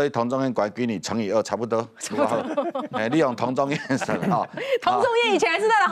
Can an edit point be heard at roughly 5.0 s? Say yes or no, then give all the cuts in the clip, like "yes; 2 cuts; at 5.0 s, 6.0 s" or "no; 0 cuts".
no; 0 cuts